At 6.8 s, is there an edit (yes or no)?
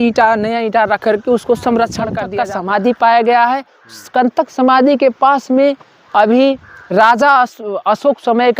no